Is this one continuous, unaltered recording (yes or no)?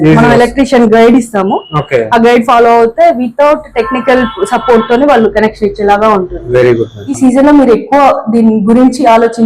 no